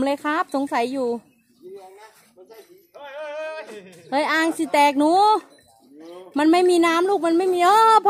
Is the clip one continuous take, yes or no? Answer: yes